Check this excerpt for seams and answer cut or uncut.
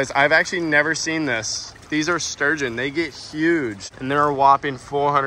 uncut